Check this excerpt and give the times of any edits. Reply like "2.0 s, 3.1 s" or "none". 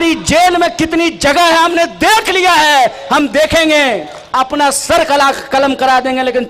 4.2 s